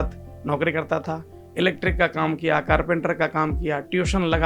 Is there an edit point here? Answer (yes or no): no